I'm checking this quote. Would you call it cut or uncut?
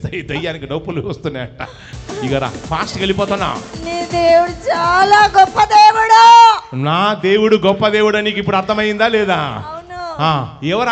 cut